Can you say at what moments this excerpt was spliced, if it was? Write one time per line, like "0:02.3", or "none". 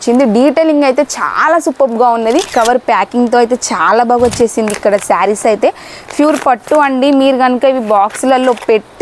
0:02.5